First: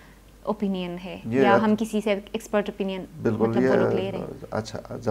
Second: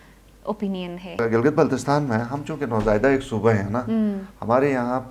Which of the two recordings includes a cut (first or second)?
second